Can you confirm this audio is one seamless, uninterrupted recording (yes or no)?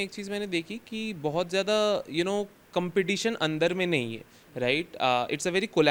yes